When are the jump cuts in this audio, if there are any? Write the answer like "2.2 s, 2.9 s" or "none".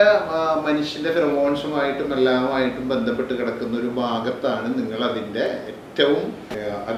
none